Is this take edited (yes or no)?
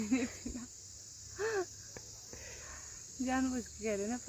no